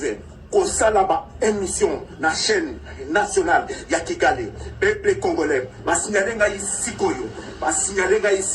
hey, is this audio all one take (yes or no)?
yes